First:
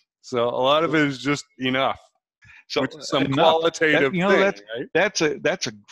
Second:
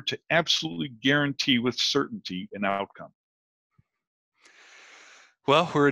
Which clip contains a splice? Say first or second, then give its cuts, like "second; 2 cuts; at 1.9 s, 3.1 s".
first; 1 cut; at 2.4 s